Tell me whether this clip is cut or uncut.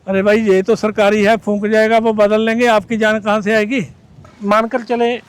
cut